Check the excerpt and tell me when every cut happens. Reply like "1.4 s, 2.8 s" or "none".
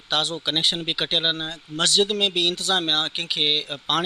none